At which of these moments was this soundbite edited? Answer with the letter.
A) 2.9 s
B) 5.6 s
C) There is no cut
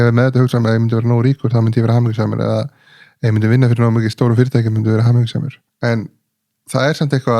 B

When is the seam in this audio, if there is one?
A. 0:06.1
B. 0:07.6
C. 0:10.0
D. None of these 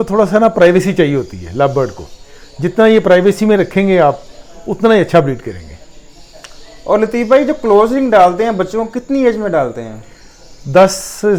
D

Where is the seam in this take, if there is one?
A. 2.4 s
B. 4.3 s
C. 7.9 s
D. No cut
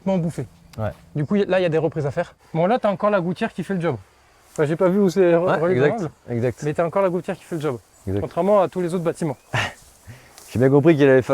A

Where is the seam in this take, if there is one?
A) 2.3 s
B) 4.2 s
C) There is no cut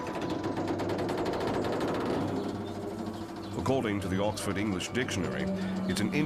B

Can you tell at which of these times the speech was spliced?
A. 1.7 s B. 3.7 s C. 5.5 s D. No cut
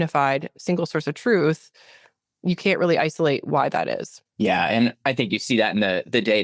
D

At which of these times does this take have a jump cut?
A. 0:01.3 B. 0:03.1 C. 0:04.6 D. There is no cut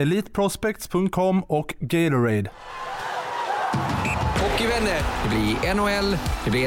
B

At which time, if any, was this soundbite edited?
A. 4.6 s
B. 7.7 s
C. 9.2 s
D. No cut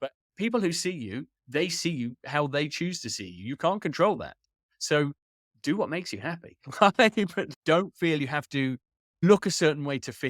C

